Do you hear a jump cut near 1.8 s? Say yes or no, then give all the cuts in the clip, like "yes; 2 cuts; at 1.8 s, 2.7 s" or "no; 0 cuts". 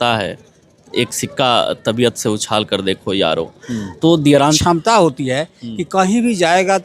no; 1 cut; at 4.6 s